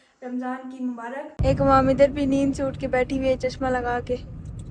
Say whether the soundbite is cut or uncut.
cut